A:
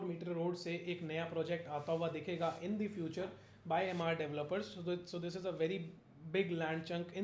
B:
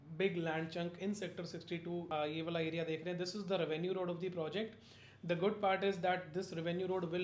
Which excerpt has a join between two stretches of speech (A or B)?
B